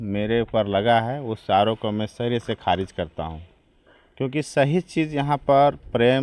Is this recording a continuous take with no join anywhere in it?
yes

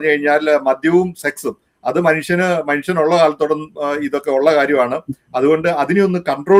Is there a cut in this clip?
no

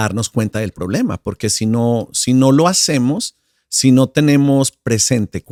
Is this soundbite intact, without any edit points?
yes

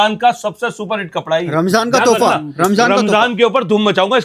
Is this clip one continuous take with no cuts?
yes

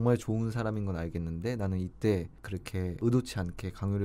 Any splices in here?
yes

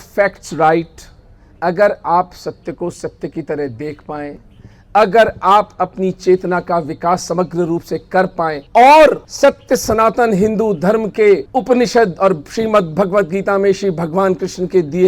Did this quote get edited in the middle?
yes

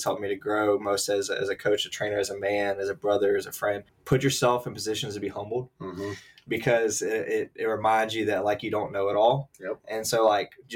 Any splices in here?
yes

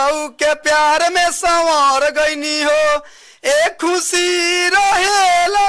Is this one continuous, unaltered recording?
yes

